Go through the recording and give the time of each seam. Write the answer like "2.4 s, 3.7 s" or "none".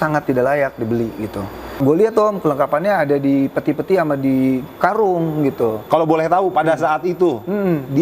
1.8 s, 5.8 s